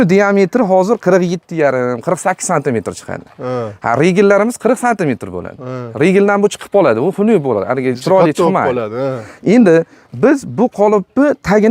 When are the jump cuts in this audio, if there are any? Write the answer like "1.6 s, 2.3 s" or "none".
none